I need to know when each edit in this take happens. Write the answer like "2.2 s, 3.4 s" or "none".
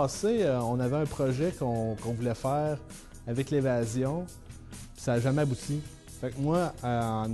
none